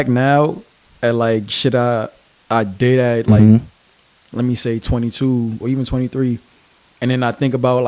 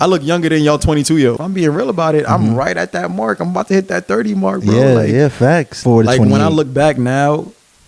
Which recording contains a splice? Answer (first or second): second